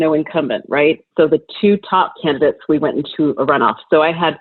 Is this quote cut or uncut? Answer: cut